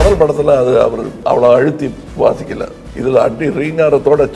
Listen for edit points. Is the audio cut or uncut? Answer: cut